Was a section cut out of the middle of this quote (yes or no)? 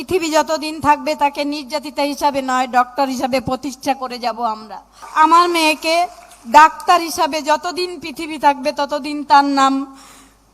yes